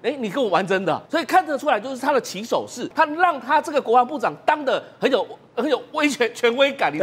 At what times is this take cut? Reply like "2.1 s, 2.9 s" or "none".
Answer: 2.9 s